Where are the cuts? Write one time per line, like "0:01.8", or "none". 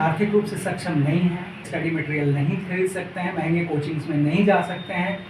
0:01.7